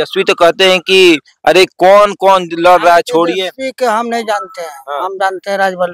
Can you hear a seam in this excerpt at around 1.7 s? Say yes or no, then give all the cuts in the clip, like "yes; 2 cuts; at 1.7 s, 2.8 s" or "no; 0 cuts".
no; 0 cuts